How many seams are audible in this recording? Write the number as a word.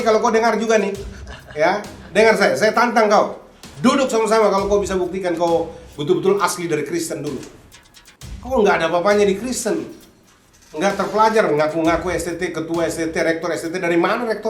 zero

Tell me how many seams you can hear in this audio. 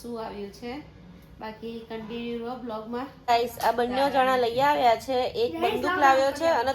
one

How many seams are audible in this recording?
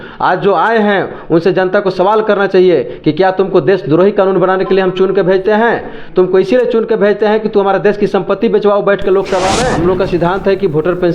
one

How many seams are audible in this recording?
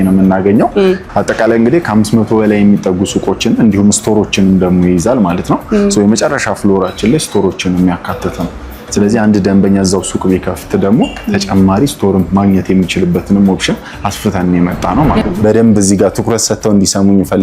two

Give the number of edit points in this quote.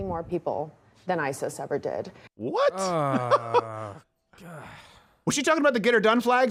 zero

